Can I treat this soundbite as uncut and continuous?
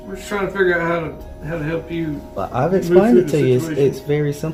yes; 0 cuts

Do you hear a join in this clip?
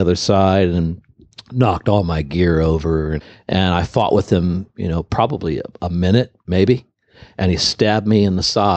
yes; 1 cut; at 3.2 s

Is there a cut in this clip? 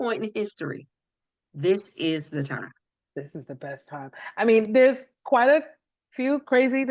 no; 0 cuts

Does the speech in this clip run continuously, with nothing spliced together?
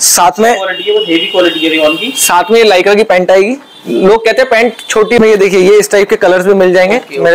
no; 1 cut; at 5.2 s

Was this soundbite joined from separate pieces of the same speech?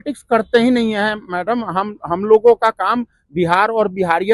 no; 0 cuts

